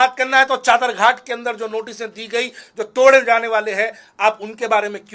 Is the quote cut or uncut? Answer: uncut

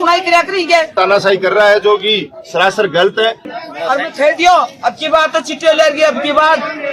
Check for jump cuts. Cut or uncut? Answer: cut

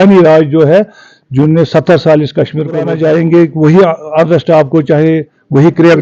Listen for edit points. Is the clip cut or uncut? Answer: cut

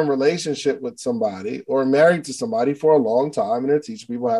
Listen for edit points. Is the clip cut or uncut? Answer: uncut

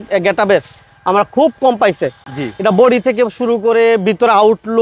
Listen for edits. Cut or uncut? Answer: uncut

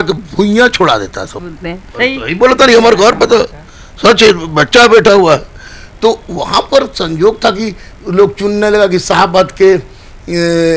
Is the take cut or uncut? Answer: uncut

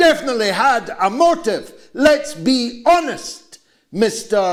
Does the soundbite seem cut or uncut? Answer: uncut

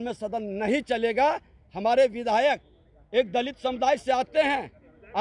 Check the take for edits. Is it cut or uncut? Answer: uncut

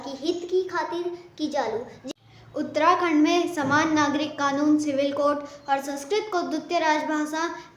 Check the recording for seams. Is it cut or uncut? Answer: cut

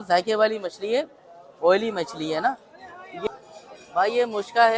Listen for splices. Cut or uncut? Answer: cut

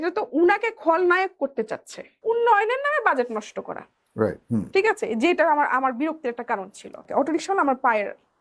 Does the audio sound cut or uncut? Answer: cut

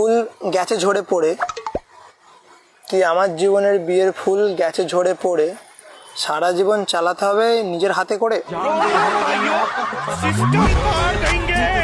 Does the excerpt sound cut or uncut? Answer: uncut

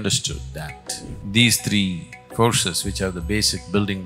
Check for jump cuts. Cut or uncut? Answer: cut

